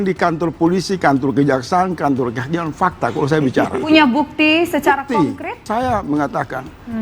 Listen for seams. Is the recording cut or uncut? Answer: cut